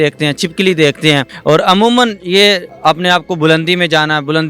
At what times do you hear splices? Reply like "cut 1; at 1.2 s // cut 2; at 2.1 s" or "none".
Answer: cut 1; at 1.3 s // cut 2; at 2.7 s